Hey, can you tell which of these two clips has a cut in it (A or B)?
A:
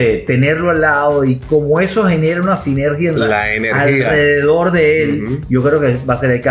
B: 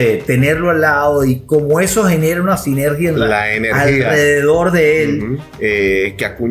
B